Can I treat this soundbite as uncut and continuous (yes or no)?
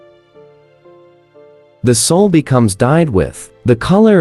yes